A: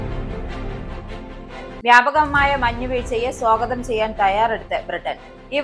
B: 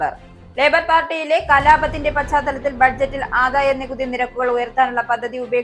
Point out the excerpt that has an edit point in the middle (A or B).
A